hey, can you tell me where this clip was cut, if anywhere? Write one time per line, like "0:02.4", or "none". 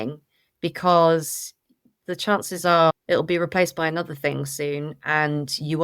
0:02.9